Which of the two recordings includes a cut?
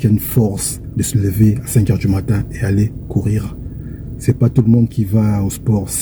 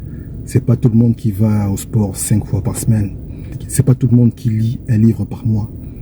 second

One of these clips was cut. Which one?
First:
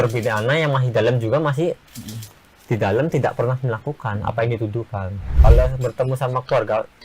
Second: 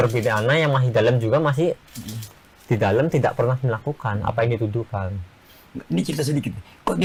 first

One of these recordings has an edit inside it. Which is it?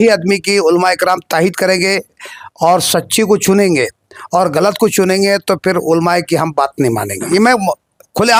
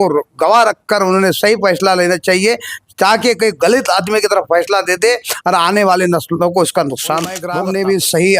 second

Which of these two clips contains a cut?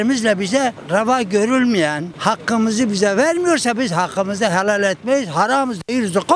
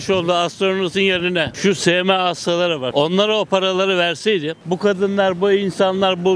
second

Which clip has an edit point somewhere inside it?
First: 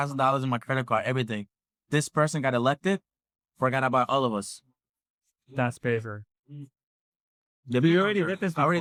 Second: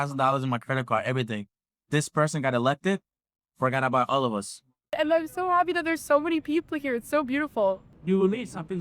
second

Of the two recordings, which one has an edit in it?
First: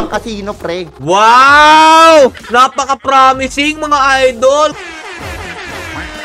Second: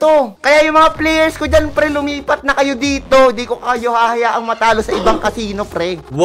first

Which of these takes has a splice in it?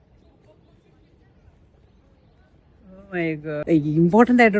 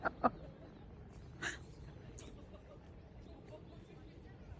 first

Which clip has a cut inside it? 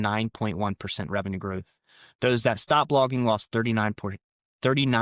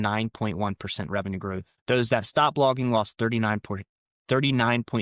second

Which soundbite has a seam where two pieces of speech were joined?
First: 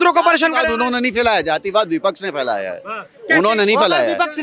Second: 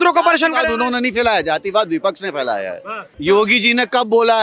second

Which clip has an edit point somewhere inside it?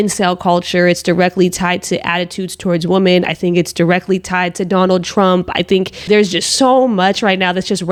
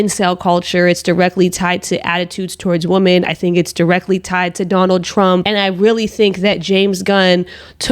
second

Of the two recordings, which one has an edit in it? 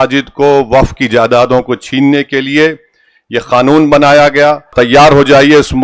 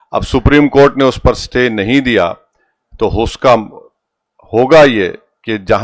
first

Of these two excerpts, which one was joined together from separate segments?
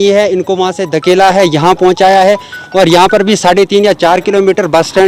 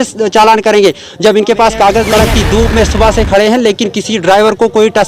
second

